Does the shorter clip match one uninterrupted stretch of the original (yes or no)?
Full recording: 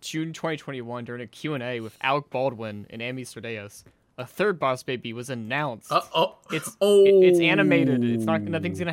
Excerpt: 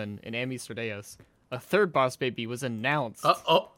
yes